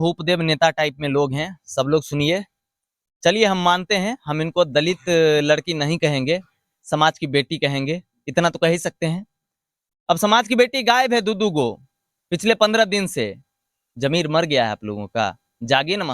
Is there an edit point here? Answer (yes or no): no